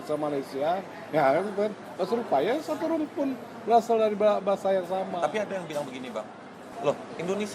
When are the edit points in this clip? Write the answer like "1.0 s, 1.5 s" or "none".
6.6 s